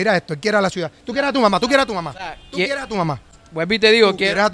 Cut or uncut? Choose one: uncut